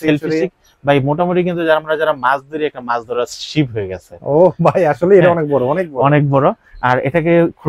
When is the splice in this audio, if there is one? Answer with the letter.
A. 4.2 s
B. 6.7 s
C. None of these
C